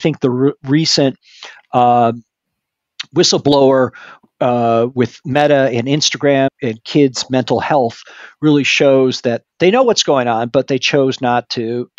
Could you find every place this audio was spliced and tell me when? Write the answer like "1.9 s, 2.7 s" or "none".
6.5 s